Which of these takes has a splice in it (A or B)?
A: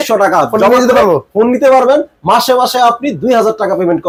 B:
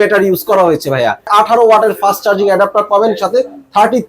B